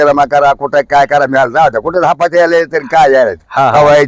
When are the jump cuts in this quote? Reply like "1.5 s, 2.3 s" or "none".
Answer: none